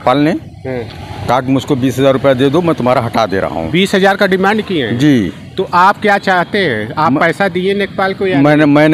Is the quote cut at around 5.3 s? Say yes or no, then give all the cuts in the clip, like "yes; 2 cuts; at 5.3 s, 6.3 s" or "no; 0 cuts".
no; 0 cuts